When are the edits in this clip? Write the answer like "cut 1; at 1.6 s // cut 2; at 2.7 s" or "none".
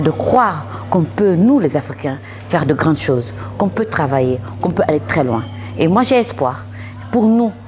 none

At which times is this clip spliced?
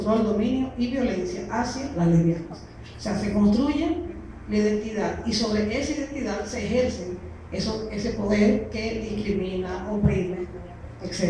cut 1; at 7.8 s

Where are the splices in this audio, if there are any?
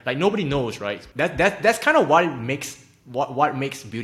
cut 1; at 1.0 s

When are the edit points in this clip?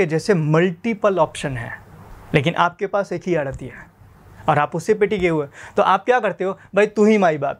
none

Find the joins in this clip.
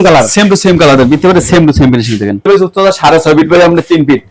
cut 1; at 2.5 s

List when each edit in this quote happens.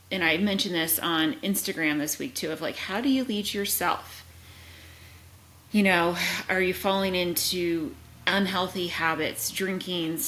none

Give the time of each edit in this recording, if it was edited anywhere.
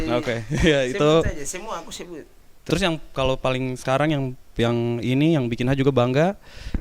cut 1; at 2.6 s

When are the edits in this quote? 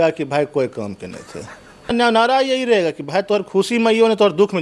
cut 1; at 1.9 s

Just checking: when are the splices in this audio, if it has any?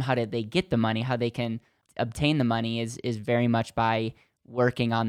cut 1; at 1.8 s

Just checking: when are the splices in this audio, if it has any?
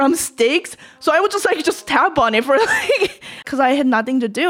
cut 1; at 3.4 s

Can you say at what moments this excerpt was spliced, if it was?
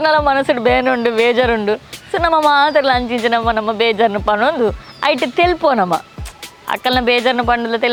none

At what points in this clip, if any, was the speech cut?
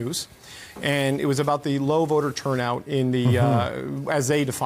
none

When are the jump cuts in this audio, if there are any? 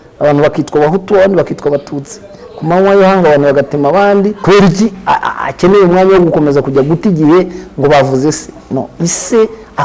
cut 1; at 4.4 s

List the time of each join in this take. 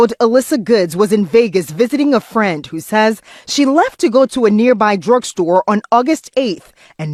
none

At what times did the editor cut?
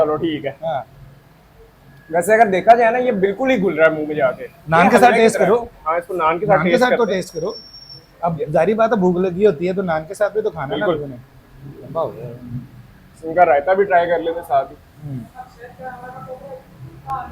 none

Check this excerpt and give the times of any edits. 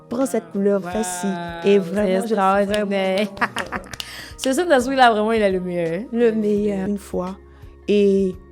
cut 1; at 6.9 s

